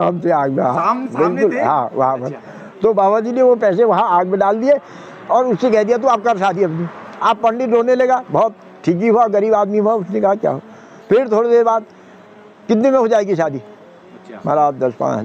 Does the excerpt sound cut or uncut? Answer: uncut